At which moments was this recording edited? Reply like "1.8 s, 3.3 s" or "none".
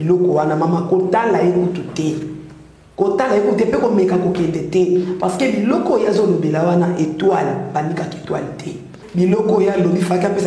8.9 s